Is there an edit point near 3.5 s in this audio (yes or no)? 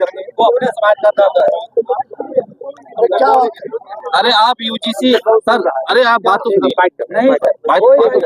no